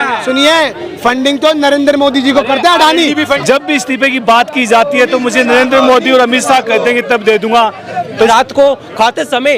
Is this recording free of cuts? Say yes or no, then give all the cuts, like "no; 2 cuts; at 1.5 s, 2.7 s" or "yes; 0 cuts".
no; 2 cuts; at 3.3 s, 8.3 s